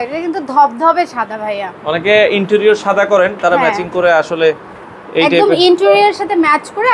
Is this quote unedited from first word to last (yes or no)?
yes